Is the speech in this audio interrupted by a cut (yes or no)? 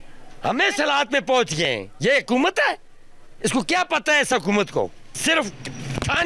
no